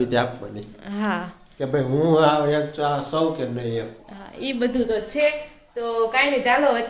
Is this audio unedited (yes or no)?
yes